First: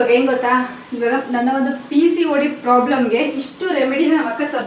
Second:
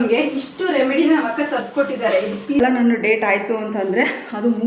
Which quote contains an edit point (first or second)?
second